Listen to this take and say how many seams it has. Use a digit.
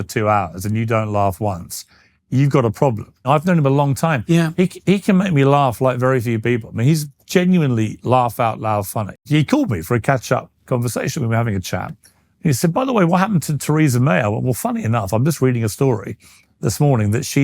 2